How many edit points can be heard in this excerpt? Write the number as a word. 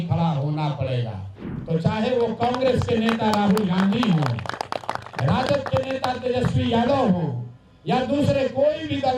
one